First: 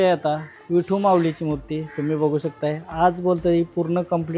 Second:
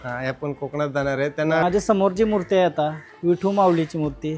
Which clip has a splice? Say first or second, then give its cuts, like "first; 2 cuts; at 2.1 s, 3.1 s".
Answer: second; 1 cut; at 1.6 s